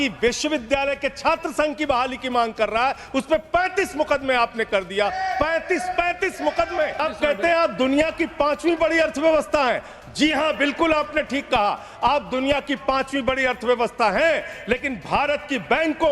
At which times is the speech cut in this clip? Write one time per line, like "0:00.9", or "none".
0:07.0